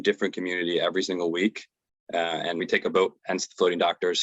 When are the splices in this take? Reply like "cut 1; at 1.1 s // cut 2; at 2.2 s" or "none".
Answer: cut 1; at 2.6 s